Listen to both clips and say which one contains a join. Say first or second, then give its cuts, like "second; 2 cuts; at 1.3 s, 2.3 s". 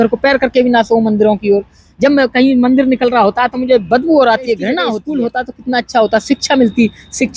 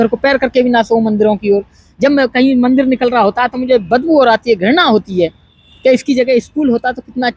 first; 1 cut; at 4.9 s